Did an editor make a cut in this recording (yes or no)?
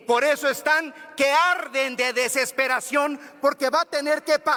no